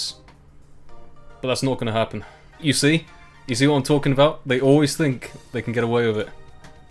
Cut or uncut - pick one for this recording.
cut